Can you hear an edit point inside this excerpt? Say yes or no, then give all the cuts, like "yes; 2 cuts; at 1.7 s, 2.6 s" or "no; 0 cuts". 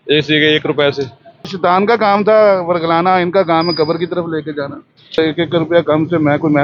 yes; 2 cuts; at 1.5 s, 5.2 s